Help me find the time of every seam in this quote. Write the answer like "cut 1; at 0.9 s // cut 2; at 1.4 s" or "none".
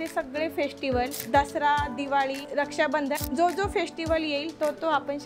cut 1; at 1.2 s // cut 2; at 3.0 s